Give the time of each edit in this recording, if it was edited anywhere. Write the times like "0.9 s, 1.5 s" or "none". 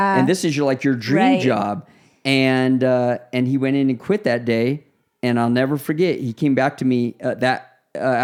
none